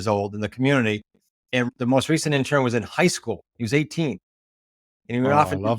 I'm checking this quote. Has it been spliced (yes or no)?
yes